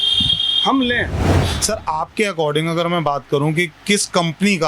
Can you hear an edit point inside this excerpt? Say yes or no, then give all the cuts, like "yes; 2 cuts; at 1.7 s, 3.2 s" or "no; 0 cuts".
yes; 1 cut; at 1.4 s